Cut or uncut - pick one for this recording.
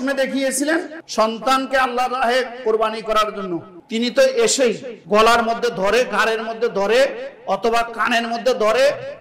cut